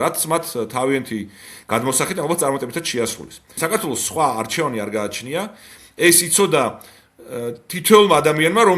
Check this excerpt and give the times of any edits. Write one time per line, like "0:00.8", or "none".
0:03.6